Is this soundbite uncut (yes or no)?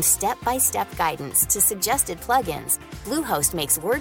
yes